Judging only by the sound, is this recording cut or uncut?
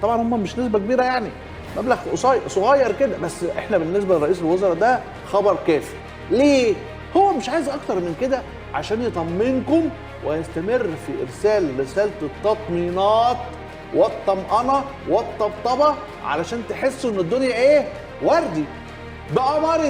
uncut